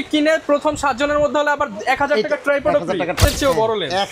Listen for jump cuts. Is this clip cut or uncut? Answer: cut